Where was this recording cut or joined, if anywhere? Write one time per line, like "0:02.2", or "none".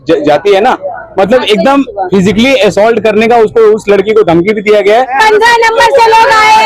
0:05.1